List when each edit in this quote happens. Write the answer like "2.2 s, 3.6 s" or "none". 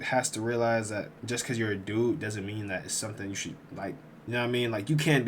4.1 s